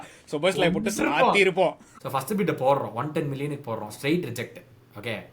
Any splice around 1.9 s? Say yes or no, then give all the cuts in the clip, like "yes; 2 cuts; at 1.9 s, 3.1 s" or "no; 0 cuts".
yes; 1 cut; at 1.9 s